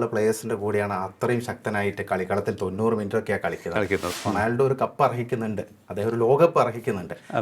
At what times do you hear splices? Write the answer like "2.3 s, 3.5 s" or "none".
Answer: 4.1 s